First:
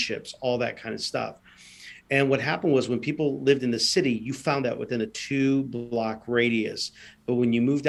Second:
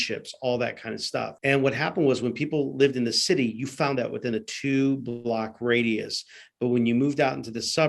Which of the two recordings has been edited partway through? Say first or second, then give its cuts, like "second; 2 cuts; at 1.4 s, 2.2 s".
second; 1 cut; at 1.3 s